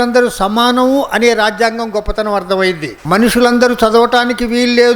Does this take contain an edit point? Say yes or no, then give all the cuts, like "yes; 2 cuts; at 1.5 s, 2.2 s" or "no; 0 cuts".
yes; 1 cut; at 2.9 s